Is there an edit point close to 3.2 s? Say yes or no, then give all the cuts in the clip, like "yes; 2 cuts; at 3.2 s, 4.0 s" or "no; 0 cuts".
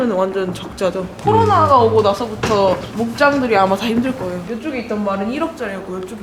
no; 2 cuts; at 1.1 s, 4.4 s